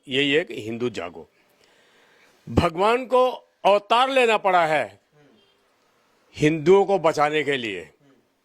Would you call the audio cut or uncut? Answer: uncut